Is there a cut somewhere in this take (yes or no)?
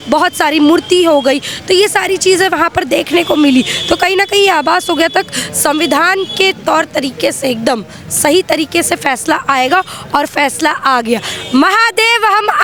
no